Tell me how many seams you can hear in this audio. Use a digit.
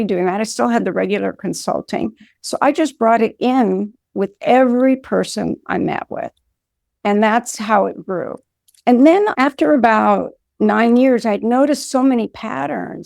1